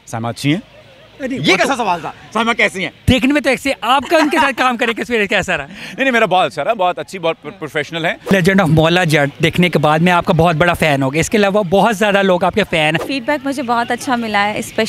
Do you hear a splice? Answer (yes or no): yes